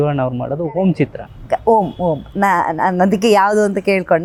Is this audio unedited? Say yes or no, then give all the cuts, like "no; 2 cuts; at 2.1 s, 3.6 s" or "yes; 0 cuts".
yes; 0 cuts